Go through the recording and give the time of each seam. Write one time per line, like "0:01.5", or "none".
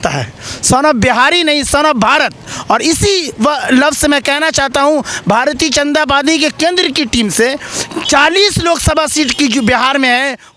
none